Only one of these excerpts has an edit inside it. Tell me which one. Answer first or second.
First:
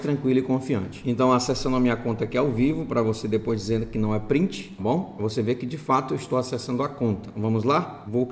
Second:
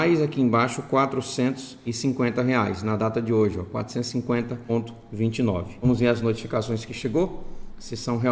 first